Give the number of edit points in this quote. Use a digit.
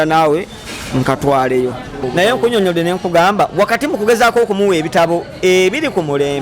1